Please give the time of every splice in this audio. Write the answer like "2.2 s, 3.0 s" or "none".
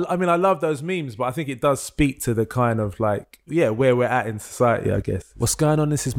3.3 s, 5.3 s